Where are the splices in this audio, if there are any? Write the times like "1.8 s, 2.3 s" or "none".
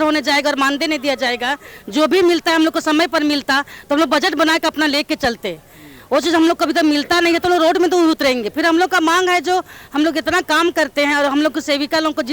none